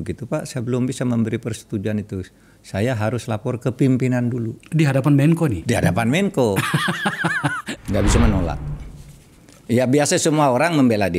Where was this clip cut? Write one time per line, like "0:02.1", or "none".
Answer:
0:07.6